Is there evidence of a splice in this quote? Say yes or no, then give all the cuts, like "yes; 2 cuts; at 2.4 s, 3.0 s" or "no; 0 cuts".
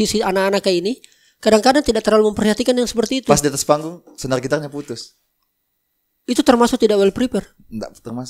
no; 0 cuts